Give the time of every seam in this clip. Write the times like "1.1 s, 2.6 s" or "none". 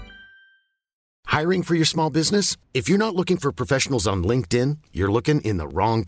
1.1 s